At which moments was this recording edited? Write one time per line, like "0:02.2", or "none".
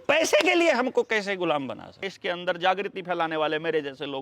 0:02.0